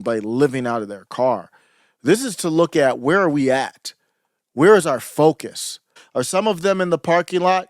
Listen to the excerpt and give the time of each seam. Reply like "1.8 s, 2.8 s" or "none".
6.0 s